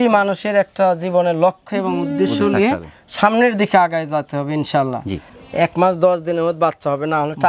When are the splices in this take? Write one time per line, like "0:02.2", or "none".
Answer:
0:05.4